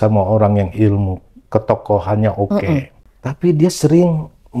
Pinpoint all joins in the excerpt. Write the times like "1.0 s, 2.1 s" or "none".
3.0 s